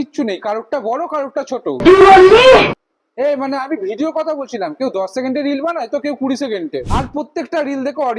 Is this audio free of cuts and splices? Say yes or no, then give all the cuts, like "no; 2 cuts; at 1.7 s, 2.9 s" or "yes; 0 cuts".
yes; 0 cuts